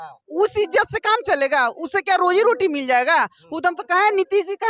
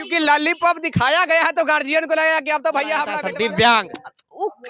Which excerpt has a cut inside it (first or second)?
second